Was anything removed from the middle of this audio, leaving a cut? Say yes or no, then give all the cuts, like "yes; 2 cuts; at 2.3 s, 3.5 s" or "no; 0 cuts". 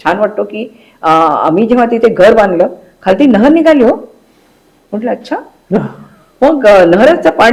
no; 0 cuts